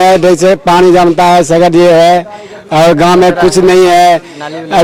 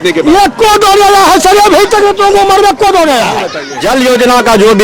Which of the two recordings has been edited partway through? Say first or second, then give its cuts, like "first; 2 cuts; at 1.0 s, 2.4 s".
second; 1 cut; at 3.7 s